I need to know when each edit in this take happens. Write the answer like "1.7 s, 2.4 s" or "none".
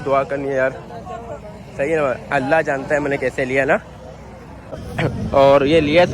4.9 s